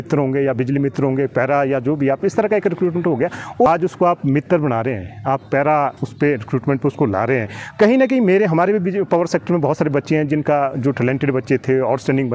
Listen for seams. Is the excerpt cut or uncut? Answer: cut